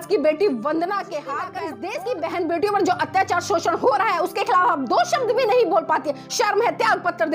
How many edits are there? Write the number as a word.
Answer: one